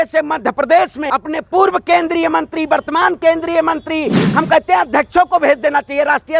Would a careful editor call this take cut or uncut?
cut